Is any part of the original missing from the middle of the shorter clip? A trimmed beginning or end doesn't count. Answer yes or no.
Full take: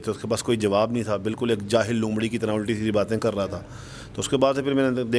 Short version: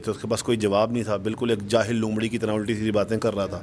no